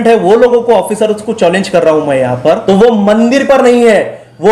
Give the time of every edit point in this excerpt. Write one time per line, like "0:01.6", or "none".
0:02.6